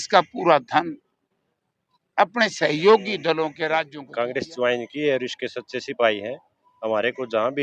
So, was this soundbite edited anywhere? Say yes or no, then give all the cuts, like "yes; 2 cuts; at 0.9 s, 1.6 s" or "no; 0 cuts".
yes; 1 cut; at 4.0 s